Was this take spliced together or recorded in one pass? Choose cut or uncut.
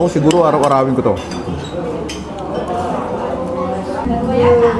uncut